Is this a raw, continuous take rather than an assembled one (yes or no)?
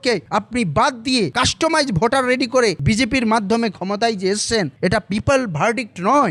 no